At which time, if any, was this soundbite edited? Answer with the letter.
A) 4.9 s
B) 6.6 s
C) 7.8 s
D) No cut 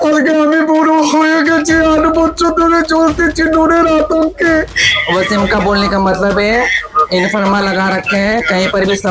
A